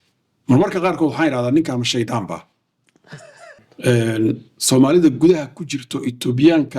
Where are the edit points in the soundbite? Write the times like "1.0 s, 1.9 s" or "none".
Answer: 3.7 s